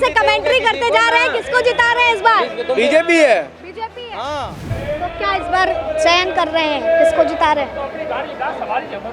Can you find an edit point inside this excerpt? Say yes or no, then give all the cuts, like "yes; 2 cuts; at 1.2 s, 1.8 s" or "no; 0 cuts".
yes; 1 cut; at 4.7 s